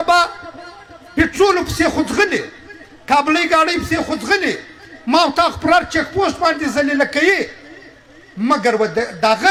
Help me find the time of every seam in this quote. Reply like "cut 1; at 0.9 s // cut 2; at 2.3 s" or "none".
none

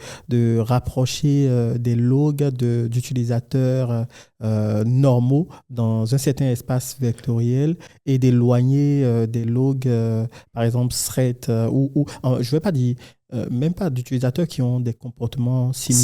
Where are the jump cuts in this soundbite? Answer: none

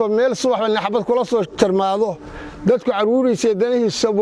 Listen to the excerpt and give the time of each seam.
none

